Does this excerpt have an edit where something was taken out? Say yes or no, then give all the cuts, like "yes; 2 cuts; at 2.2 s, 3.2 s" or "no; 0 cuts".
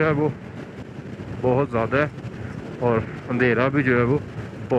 no; 0 cuts